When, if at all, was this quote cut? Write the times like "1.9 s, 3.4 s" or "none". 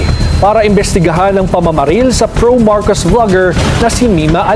none